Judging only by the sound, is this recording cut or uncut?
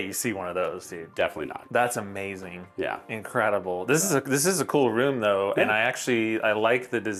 uncut